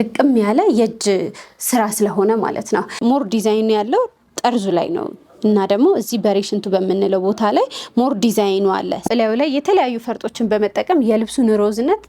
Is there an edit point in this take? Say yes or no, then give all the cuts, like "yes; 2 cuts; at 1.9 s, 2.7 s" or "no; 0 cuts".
yes; 2 cuts; at 3.0 s, 9.1 s